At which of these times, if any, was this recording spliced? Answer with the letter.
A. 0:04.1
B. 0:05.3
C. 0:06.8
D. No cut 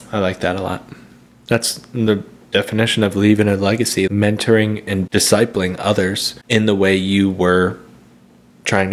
A